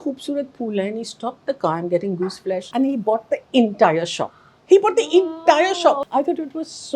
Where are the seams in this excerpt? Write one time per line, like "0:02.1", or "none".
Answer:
0:02.7
0:06.0